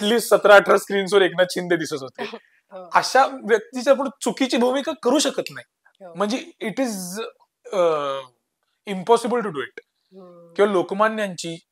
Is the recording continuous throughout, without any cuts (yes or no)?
yes